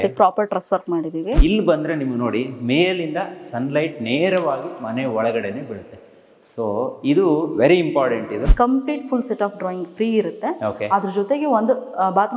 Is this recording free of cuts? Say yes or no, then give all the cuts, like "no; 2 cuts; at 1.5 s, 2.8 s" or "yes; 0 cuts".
no; 2 cuts; at 1.3 s, 8.5 s